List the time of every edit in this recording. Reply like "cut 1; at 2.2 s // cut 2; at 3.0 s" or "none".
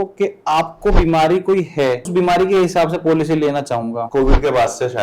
cut 1; at 2.1 s // cut 2; at 4.0 s